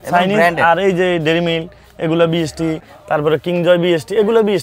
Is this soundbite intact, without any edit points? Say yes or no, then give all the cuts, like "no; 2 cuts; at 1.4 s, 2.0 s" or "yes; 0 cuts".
no; 1 cut; at 2.9 s